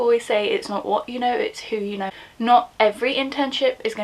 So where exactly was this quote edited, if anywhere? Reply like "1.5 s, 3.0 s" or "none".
2.1 s